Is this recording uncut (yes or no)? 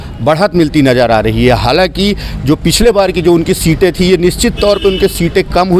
yes